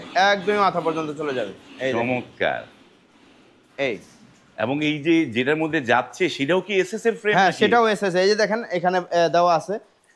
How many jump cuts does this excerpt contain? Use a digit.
0